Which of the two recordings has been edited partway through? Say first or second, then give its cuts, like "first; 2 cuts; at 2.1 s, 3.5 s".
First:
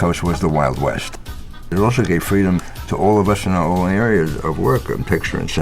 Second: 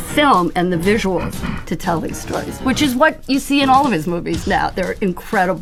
first; 3 cuts; at 1.2 s, 2.8 s, 4.8 s